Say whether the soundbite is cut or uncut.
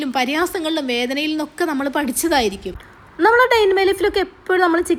uncut